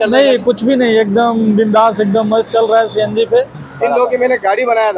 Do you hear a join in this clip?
yes; 1 cut; at 3.6 s

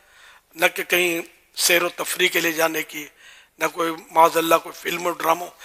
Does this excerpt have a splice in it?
no; 0 cuts

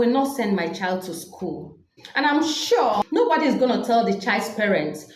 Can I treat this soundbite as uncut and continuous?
no; 2 cuts; at 2.0 s, 3.1 s

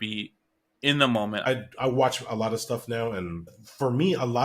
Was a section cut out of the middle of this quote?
yes; 2 cuts; at 1.4 s, 3.5 s

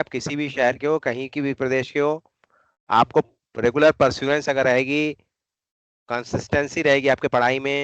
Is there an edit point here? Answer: no; 0 cuts

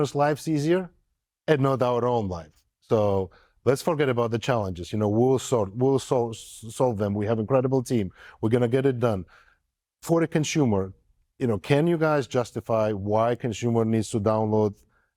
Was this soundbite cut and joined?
no; 0 cuts

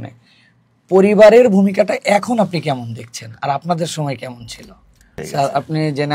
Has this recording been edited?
yes; 1 cut; at 5.2 s

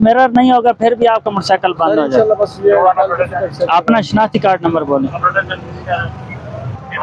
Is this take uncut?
yes; 0 cuts

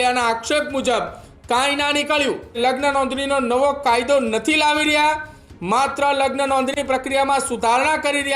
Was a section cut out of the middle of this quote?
yes; 1 cut; at 2.6 s

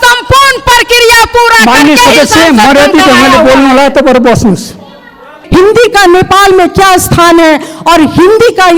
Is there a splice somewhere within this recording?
yes; 1 cut; at 5.4 s

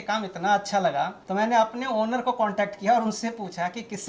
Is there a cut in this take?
yes; 1 cut; at 1.2 s

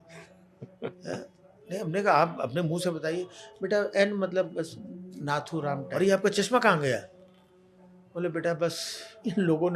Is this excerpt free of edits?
no; 1 cut; at 5.9 s

